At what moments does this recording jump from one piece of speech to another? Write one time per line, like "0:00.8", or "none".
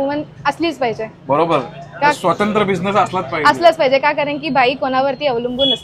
none